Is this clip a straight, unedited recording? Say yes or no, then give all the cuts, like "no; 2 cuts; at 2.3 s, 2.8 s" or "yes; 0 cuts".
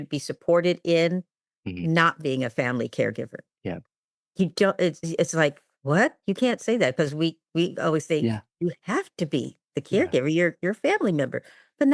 yes; 0 cuts